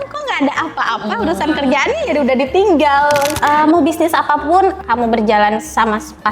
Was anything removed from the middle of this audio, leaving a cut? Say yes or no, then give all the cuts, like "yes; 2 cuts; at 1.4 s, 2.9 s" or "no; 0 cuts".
yes; 2 cuts; at 3.3 s, 4.8 s